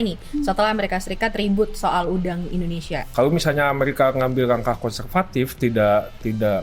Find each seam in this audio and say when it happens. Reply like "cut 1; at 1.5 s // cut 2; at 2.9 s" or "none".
cut 1; at 3.0 s

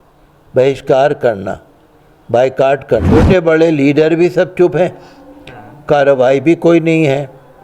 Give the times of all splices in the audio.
cut 1; at 3.1 s

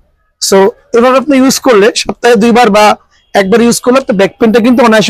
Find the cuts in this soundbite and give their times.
none

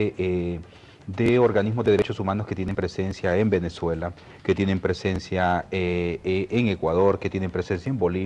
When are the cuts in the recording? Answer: cut 1; at 6.0 s

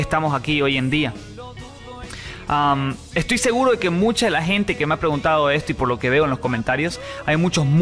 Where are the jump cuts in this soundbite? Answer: cut 1; at 3.5 s

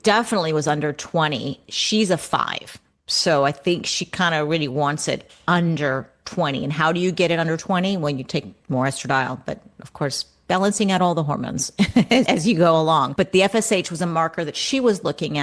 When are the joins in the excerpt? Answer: cut 1; at 8.6 s // cut 2; at 13.1 s

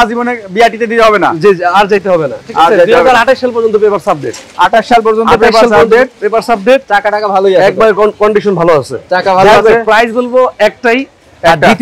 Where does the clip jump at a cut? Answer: none

